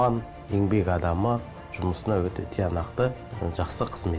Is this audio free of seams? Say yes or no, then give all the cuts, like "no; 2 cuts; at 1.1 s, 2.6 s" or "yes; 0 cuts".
no; 2 cuts; at 1.6 s, 3.3 s